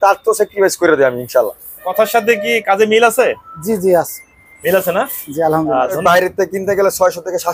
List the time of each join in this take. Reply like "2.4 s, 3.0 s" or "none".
1.9 s, 6.0 s